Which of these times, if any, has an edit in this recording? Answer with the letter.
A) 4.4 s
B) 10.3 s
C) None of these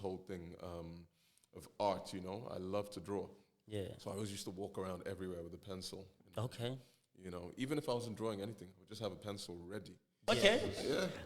B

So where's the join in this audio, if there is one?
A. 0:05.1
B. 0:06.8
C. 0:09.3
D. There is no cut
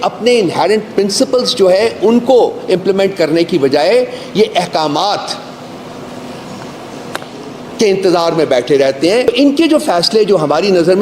C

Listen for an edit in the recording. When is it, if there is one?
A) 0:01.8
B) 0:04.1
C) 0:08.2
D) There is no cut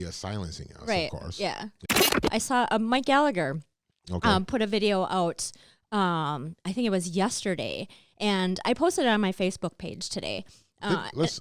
A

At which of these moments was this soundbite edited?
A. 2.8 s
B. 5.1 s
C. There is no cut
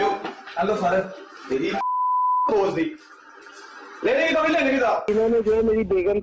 B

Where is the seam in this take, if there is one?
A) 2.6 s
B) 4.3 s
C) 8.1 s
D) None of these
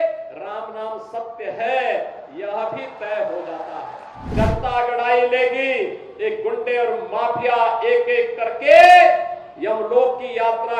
B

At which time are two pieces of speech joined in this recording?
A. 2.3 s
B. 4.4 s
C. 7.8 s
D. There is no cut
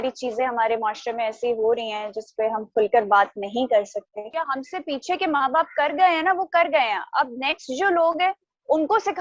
B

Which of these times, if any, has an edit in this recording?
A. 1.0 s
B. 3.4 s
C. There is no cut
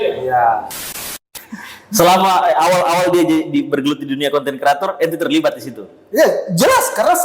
A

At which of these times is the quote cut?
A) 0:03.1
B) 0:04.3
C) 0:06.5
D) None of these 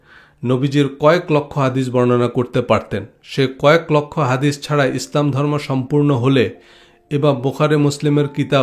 D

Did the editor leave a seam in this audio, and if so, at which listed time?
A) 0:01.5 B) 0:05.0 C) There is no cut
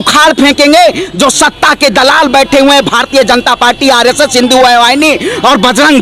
C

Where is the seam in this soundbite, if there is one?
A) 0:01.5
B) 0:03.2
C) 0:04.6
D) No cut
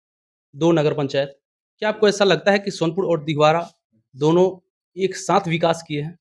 D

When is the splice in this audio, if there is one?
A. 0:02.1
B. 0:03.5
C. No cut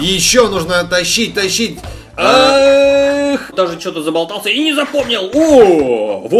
B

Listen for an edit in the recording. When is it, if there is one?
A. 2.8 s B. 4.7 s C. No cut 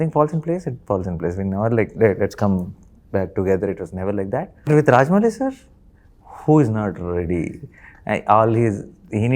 B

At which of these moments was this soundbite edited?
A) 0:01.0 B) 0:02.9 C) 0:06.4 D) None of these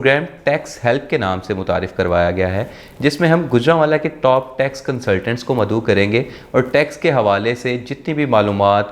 D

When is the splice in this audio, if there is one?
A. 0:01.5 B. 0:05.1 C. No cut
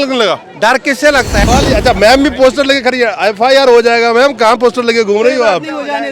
A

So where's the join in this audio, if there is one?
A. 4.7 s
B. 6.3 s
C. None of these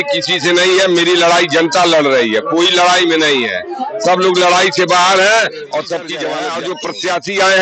B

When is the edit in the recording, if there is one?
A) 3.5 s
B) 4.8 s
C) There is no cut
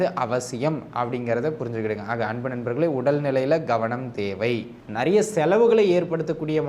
B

